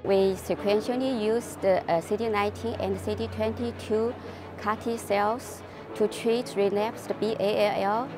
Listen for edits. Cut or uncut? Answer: uncut